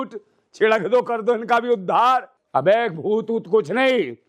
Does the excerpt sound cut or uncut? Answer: cut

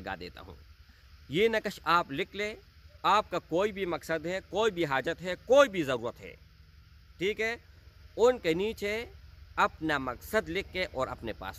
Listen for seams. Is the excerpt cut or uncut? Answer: uncut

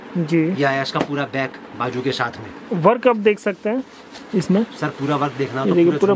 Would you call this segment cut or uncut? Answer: uncut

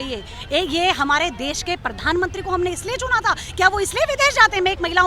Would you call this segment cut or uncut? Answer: uncut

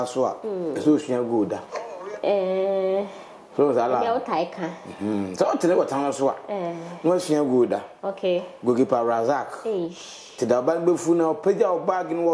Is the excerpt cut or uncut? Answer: uncut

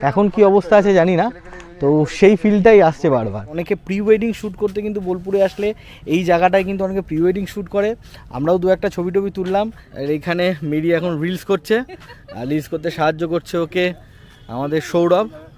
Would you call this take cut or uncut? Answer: cut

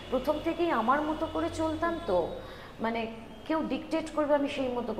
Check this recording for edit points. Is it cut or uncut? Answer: uncut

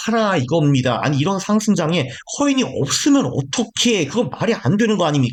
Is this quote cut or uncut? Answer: uncut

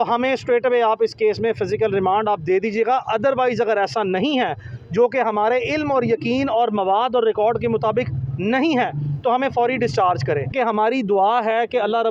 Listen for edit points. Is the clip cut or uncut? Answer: cut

